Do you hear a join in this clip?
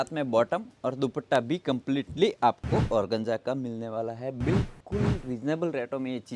no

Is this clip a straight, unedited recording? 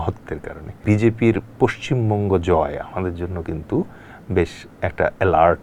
no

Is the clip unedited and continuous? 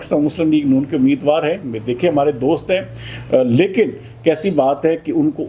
yes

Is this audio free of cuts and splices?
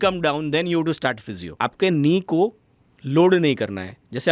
no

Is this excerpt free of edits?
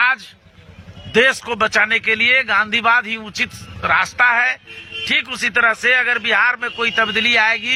yes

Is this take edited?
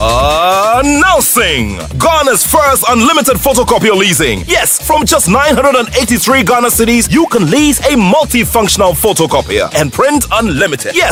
no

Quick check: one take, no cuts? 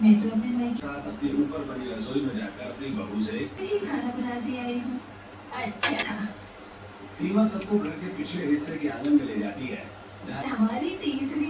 no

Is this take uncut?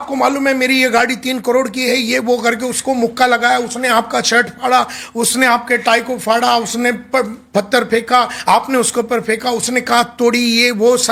yes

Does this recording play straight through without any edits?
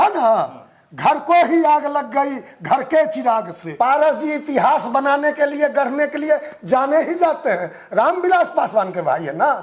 no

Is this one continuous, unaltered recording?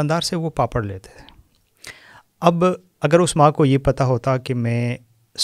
yes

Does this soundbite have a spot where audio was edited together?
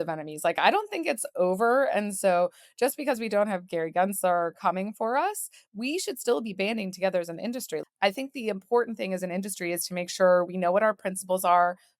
yes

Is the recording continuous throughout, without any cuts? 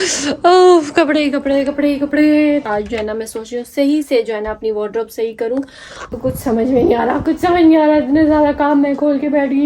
no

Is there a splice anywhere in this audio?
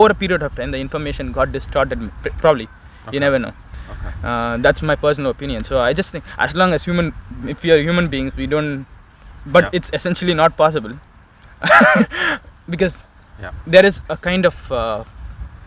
no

